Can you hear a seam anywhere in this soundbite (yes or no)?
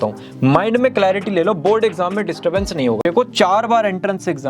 yes